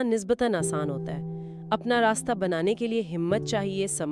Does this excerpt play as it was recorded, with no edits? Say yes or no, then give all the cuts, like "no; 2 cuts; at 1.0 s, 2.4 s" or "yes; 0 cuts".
yes; 0 cuts